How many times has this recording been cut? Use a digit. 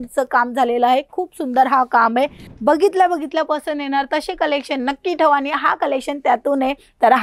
1